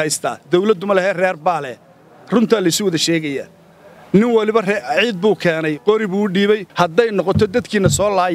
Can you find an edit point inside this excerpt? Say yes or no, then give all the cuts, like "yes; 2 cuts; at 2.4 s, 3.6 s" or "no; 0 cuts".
yes; 1 cut; at 6.7 s